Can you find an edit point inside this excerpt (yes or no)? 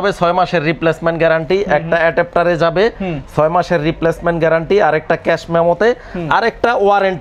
no